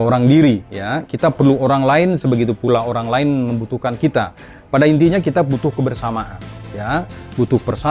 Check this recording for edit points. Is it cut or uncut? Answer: uncut